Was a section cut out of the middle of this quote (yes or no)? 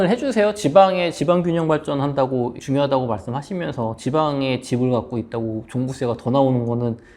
yes